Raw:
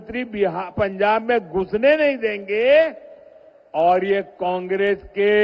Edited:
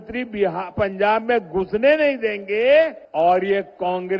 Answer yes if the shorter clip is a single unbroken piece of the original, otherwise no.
no